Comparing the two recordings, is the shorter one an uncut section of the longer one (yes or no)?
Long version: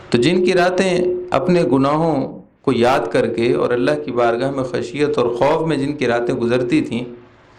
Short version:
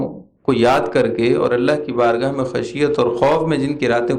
yes